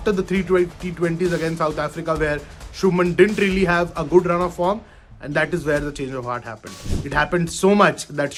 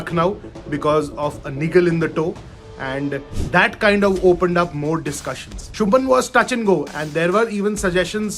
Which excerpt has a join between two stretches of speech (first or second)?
second